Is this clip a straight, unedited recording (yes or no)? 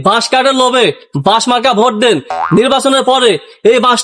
yes